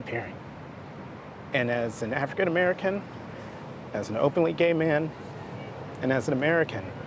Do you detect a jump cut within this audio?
no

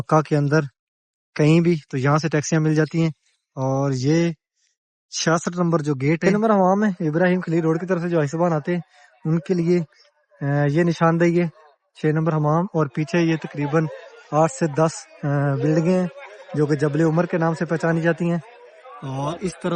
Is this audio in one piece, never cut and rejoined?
no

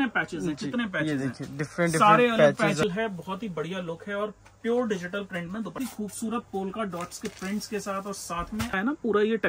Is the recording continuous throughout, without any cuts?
no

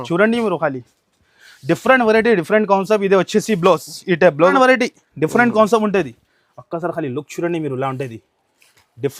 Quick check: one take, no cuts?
no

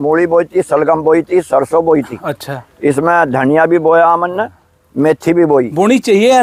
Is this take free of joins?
yes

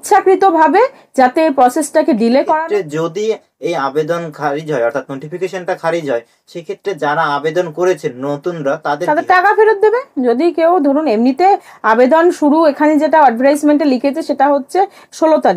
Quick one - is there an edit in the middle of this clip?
yes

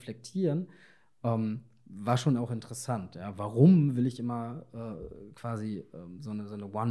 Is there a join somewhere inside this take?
no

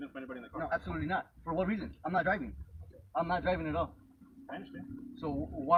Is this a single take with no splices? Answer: yes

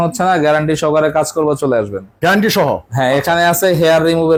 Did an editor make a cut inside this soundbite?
no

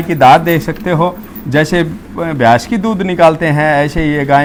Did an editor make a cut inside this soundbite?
no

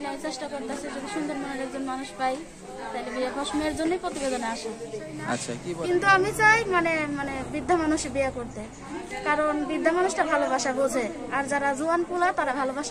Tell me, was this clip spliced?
yes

